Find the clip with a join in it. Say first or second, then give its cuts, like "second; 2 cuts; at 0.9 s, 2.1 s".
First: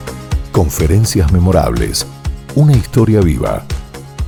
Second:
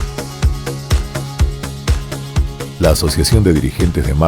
second; 1 cut; at 2.3 s